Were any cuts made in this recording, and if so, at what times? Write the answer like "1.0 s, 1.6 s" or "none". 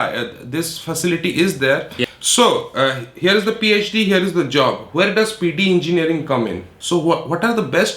2.0 s, 6.7 s